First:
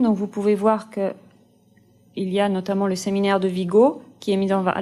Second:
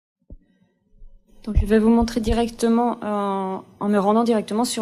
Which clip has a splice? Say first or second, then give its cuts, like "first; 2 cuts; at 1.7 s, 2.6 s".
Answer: first; 1 cut; at 3.8 s